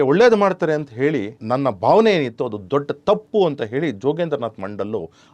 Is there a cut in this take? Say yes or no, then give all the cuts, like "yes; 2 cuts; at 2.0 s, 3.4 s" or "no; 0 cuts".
yes; 1 cut; at 1.4 s